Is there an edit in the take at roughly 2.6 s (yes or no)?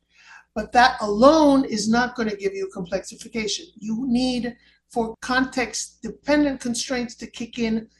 no